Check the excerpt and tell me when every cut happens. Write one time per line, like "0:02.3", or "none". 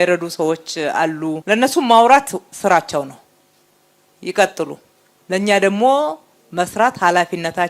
0:01.4